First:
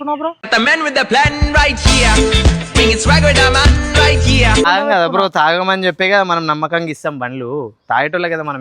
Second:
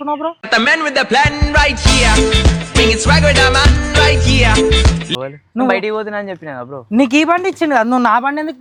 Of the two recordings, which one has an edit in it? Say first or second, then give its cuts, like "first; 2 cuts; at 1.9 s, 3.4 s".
first; 1 cut; at 4.7 s